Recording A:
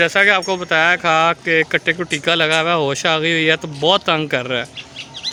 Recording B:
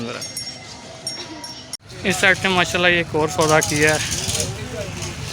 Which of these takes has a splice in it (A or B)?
B